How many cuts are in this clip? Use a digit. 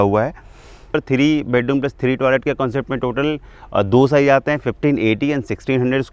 1